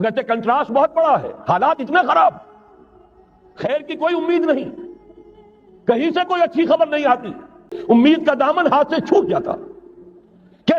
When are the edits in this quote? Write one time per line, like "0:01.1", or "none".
0:07.7